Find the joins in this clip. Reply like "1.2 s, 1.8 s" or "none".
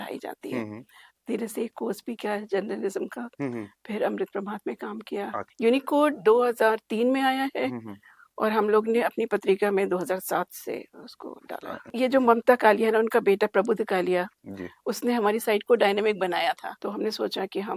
1.1 s, 5.4 s, 11.9 s, 16.7 s